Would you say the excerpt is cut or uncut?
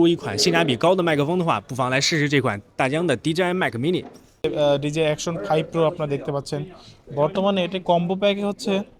cut